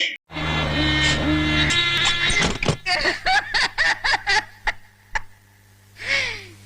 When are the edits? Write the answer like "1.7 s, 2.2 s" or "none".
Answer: 1.7 s